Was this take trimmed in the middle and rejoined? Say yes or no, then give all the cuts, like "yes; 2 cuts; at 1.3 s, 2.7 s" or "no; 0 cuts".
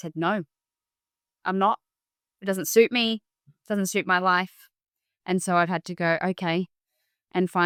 no; 0 cuts